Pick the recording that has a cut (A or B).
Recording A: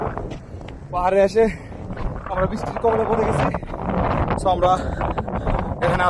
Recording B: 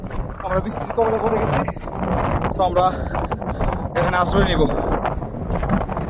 B